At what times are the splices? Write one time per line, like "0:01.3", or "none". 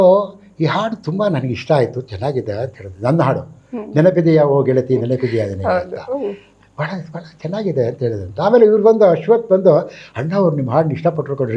none

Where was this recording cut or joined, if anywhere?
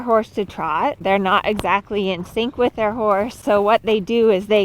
0:01.0
0:03.4

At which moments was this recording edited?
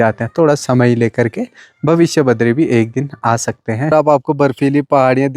0:03.9

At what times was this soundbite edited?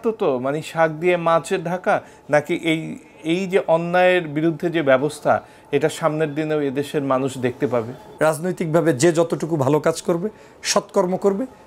0:08.0

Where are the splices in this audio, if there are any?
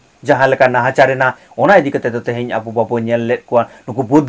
none

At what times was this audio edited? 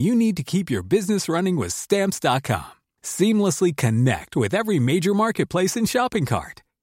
none

